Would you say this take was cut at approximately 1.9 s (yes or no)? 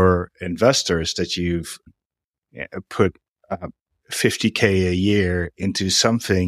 yes